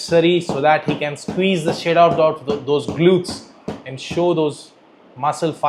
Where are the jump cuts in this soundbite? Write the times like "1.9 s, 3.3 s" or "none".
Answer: none